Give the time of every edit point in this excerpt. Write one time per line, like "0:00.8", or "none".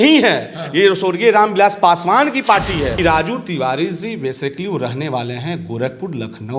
0:03.0

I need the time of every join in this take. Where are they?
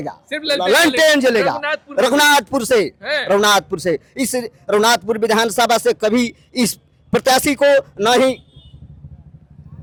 none

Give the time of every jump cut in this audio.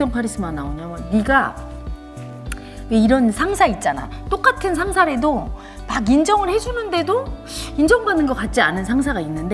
none

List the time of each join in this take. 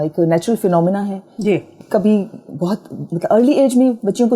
0:01.7
0:03.0

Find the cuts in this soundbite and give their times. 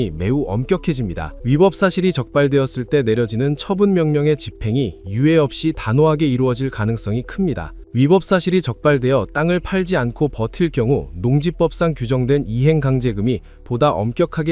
0:01.3
0:07.8

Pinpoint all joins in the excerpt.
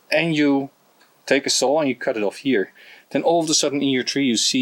none

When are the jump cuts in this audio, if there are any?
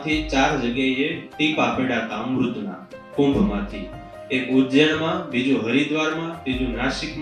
none

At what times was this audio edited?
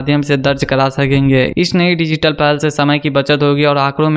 none

